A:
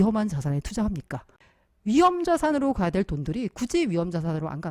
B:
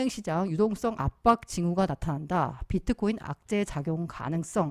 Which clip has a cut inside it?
A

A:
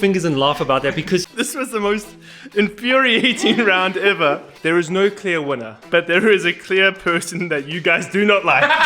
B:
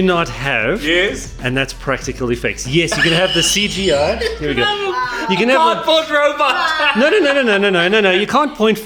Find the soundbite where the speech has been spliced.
A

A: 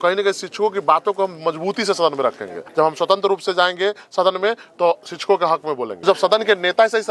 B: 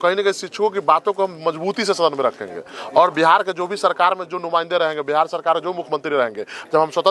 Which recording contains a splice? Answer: A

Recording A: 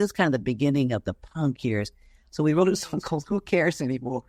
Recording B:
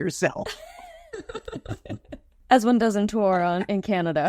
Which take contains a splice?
B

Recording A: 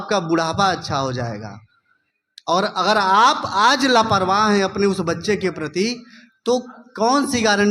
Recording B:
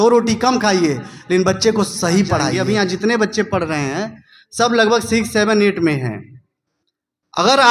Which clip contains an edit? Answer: B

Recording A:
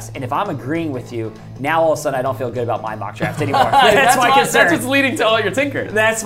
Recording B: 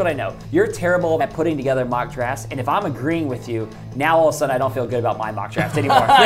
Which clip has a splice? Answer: B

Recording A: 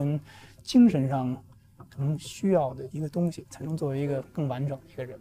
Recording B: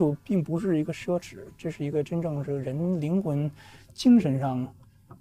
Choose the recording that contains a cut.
A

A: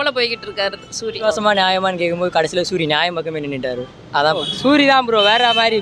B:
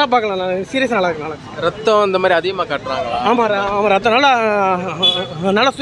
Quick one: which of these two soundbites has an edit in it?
A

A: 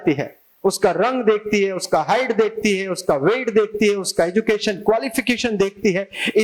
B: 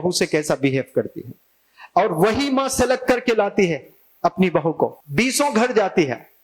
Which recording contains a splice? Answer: B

